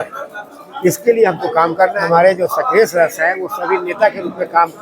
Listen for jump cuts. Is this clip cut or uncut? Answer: cut